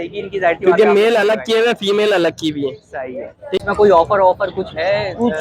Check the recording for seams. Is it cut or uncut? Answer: cut